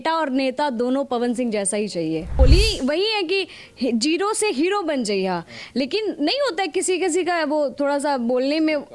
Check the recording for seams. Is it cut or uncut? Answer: cut